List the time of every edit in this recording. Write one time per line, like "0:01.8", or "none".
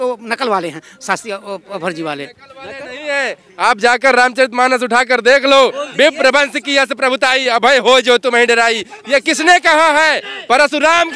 none